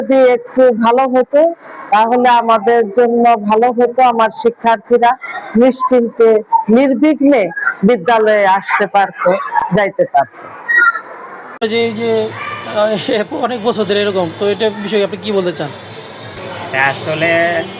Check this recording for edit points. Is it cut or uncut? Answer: uncut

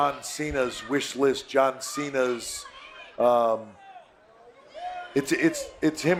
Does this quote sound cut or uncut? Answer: uncut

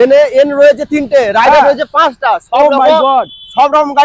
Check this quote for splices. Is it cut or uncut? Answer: uncut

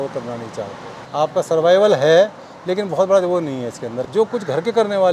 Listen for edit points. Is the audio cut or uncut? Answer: cut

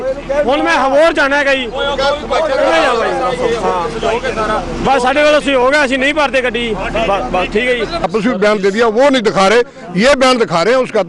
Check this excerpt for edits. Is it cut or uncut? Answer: cut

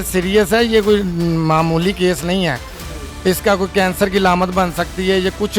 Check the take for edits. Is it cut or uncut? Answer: uncut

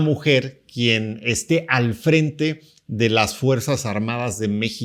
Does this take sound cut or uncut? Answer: uncut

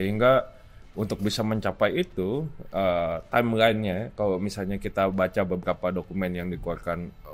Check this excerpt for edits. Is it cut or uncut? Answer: uncut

